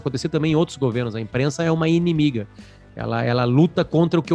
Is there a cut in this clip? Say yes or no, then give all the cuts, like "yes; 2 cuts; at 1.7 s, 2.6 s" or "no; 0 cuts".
no; 0 cuts